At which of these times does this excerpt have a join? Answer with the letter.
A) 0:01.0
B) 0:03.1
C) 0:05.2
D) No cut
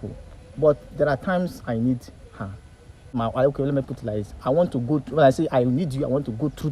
B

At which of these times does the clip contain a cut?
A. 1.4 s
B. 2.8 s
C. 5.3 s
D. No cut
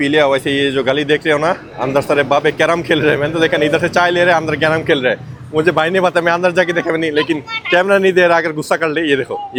D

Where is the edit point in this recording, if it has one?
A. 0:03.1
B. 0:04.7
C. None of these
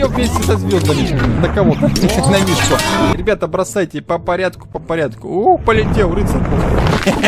A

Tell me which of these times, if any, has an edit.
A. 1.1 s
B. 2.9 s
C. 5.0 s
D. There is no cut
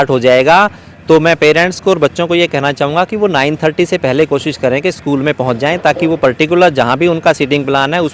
D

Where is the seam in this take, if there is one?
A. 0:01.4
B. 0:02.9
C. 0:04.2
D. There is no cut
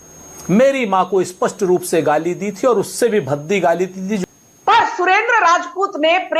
C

